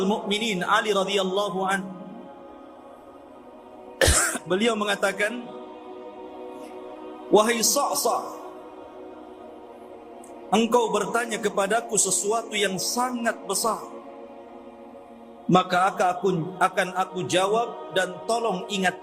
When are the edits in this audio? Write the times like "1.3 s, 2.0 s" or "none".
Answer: 2.4 s, 3.9 s, 5.7 s, 7.3 s, 8.4 s, 10.5 s, 14.0 s, 15.5 s

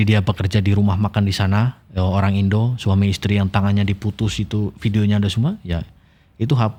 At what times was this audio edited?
none

